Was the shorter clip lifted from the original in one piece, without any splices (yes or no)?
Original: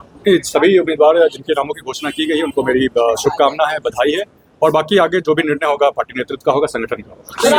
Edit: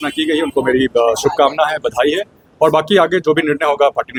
yes